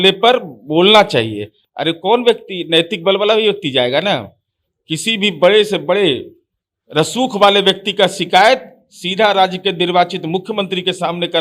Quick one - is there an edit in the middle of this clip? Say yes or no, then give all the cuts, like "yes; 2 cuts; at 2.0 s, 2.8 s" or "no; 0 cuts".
no; 0 cuts